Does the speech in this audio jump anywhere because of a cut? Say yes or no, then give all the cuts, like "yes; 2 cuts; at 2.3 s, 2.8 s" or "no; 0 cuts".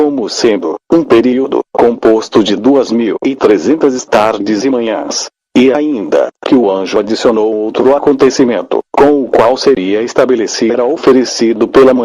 no; 0 cuts